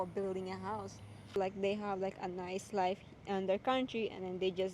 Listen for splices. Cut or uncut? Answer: cut